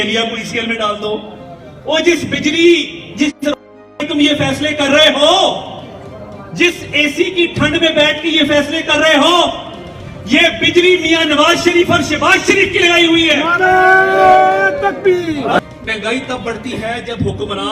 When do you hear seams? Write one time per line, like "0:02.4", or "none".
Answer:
0:15.6

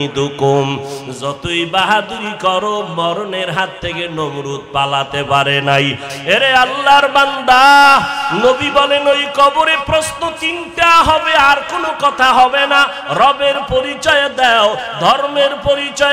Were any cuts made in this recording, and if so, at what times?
0:06.0

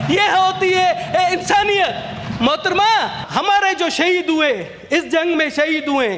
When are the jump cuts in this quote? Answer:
0:03.2

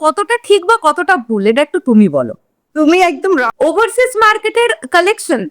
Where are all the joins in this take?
0:03.5

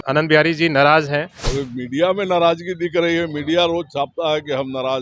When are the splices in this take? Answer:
0:01.4

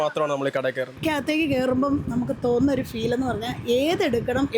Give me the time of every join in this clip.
0:01.0

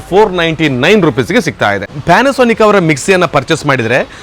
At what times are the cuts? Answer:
0:01.9

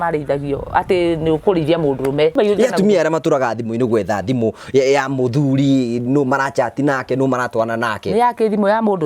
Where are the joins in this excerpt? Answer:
0:02.4

